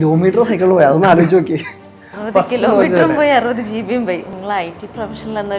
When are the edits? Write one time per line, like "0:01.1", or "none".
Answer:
0:04.3